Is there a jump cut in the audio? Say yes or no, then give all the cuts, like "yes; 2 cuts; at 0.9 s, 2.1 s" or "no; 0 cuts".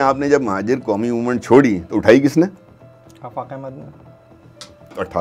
no; 0 cuts